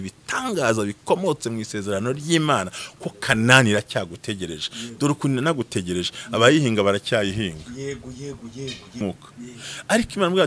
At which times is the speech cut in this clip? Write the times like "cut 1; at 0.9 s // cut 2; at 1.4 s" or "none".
cut 1; at 9.0 s